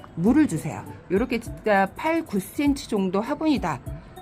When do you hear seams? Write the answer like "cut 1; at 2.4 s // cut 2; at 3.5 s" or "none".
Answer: cut 1; at 0.9 s